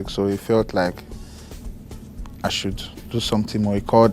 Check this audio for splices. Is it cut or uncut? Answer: uncut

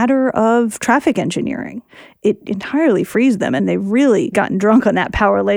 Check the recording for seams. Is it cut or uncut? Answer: cut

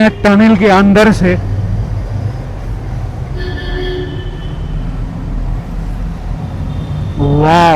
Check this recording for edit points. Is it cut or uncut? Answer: uncut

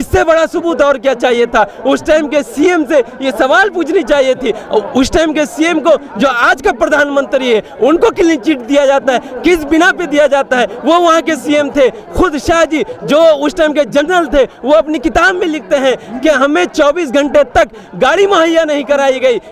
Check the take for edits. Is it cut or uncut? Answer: uncut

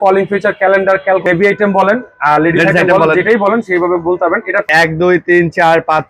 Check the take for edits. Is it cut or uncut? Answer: cut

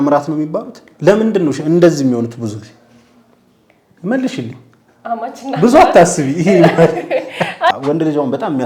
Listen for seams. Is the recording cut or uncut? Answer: cut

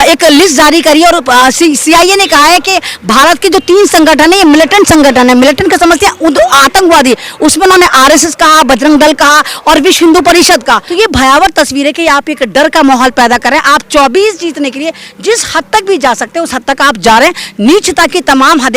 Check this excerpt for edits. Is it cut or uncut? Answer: cut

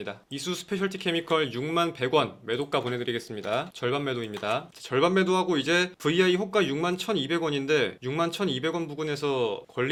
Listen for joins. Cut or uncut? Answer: uncut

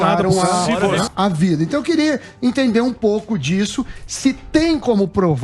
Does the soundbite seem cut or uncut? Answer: cut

